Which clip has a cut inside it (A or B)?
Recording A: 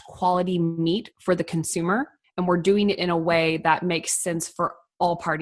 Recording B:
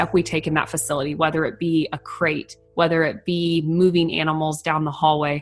A